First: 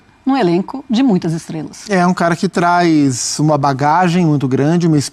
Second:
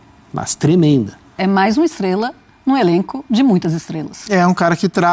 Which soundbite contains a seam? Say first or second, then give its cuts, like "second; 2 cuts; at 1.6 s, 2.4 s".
second; 1 cut; at 1.3 s